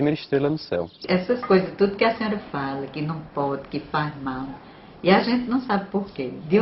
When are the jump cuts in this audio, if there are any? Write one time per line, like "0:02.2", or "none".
0:01.0